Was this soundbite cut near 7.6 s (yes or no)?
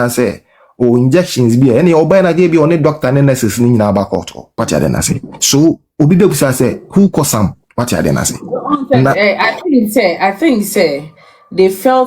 yes